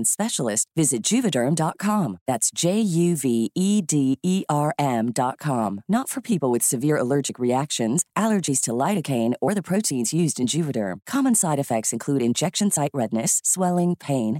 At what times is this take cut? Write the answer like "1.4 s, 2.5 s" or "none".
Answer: none